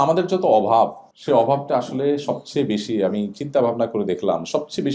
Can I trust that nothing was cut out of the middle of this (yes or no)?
no